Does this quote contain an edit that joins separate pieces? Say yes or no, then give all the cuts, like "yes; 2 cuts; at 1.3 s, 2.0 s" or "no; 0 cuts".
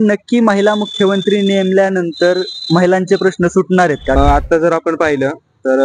yes; 1 cut; at 4.2 s